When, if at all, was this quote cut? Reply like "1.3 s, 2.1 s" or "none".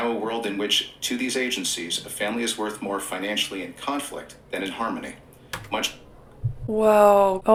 none